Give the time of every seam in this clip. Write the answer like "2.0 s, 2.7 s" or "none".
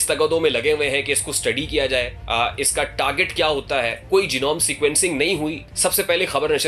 2.2 s, 4.0 s, 5.6 s